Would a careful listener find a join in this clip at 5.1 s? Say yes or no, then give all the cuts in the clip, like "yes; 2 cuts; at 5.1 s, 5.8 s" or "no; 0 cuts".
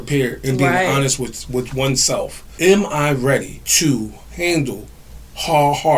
no; 2 cuts; at 2.5 s, 3.6 s